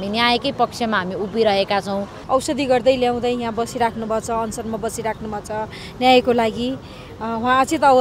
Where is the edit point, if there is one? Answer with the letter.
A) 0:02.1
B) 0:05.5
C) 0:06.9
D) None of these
A